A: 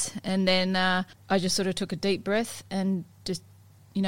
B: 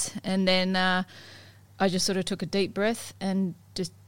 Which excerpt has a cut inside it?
A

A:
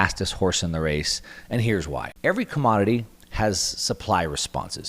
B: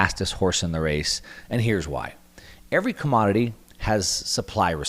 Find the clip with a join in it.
A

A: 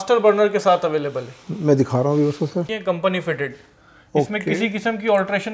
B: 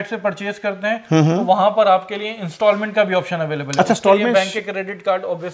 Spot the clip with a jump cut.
A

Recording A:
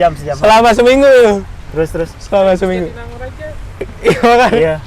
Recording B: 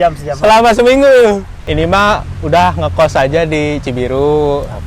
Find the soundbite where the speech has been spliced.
B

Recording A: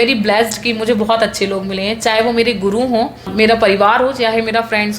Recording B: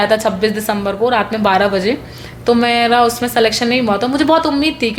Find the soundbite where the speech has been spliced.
A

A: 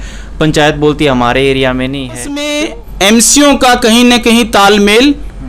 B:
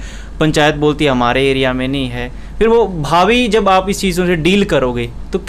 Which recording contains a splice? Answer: A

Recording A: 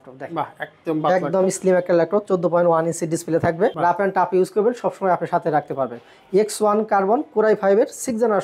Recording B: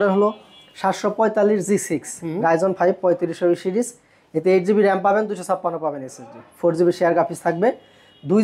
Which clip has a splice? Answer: A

